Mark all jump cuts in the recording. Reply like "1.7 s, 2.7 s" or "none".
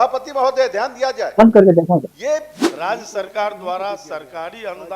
2.6 s